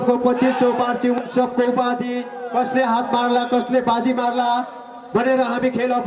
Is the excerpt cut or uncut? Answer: uncut